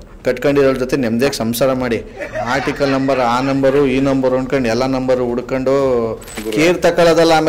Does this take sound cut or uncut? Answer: cut